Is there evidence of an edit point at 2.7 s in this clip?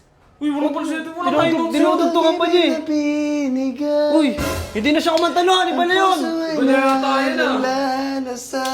no; 0 cuts

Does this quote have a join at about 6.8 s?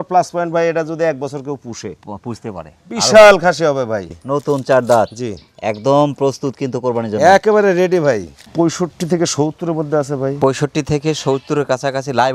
no; 2 cuts; at 4.1 s, 8.4 s

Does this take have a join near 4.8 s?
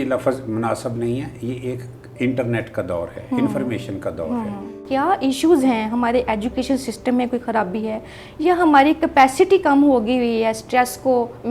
yes; 1 cut; at 4.8 s

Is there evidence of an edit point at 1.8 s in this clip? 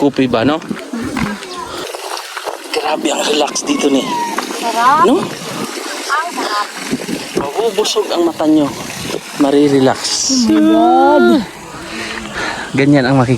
yes; 1 cut; at 1.8 s

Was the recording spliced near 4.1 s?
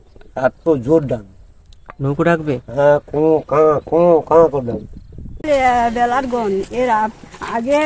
no; 1 cut; at 5.4 s

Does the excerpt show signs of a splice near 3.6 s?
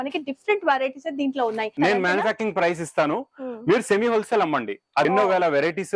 no; 2 cuts; at 1.7 s, 5.0 s

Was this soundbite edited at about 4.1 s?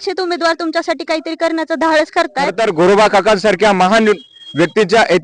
no; 1 cut; at 2.5 s

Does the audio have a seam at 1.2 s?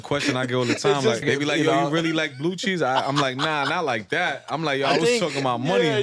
yes; 1 cut; at 1.2 s

